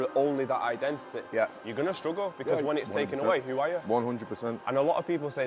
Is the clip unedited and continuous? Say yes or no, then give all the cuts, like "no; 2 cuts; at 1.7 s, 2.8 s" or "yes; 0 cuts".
yes; 0 cuts